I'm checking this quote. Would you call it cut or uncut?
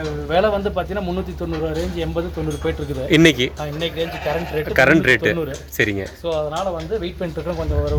uncut